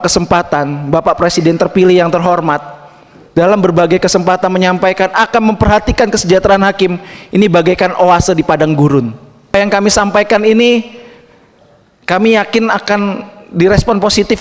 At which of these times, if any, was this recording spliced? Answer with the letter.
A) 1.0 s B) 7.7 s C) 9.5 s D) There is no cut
C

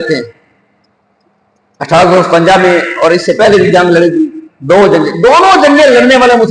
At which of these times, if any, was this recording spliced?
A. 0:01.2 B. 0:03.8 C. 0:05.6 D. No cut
D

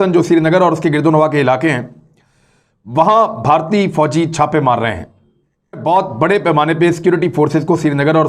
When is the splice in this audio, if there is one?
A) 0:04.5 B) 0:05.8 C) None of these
B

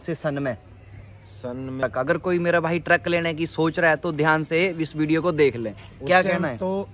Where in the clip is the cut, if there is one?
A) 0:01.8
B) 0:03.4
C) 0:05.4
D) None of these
A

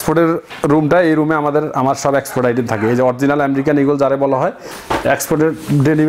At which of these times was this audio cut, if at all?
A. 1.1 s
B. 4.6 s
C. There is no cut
B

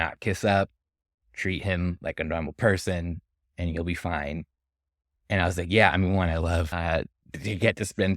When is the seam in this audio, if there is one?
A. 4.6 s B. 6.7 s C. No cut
B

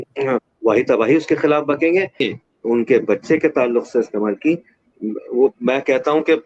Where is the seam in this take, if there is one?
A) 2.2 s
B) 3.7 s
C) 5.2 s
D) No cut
A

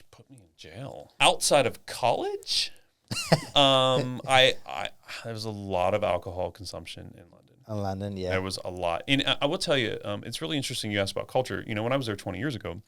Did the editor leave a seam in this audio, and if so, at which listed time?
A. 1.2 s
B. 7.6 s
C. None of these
A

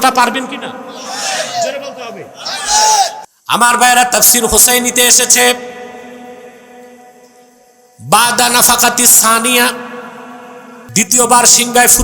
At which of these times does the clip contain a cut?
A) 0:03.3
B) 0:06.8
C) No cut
A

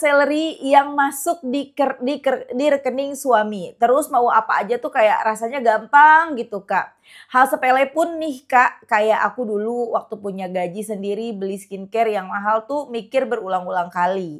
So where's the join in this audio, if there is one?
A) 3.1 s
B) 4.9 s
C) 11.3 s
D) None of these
D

